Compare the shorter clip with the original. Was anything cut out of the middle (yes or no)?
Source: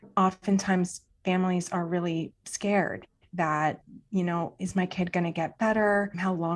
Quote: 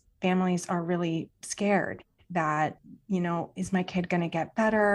no